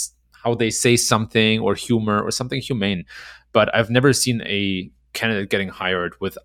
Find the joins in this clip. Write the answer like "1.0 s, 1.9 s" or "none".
none